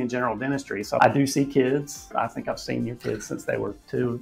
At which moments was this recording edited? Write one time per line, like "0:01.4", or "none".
0:01.0
0:02.1